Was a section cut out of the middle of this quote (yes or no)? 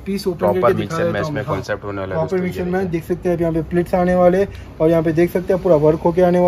no